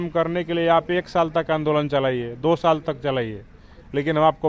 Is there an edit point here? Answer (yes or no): no